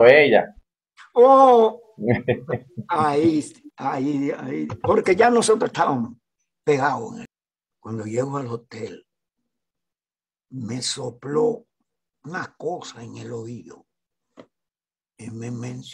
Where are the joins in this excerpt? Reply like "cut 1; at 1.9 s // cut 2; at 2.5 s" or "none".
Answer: cut 1; at 7.2 s